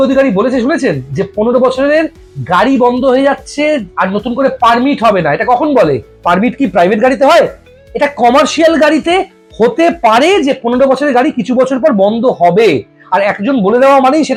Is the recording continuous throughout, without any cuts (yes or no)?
yes